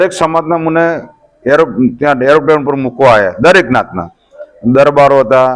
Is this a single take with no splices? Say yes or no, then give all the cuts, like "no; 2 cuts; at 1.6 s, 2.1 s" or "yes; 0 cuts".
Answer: yes; 0 cuts